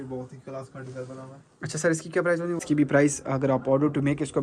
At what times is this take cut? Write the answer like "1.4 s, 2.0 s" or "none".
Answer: 2.6 s